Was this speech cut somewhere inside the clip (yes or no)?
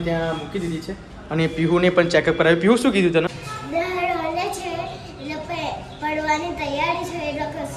yes